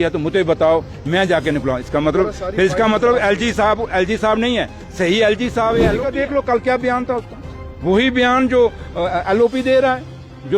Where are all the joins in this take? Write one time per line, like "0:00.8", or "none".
0:06.0